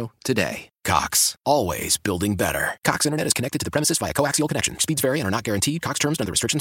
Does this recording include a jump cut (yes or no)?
no